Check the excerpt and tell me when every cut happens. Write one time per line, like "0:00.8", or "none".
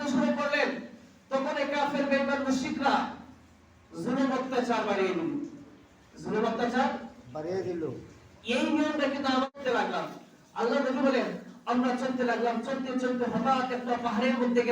0:09.5